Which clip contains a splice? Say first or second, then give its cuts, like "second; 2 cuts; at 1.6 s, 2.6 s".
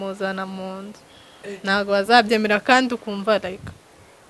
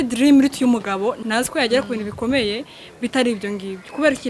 second; 1 cut; at 1.2 s